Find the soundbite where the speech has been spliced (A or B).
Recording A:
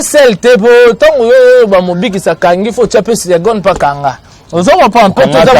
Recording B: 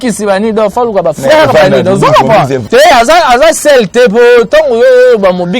B